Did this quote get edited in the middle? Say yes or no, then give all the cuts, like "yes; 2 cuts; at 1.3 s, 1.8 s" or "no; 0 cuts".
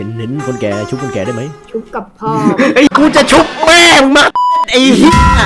yes; 1 cut; at 2.9 s